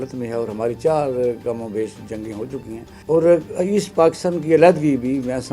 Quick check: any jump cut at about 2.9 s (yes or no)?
yes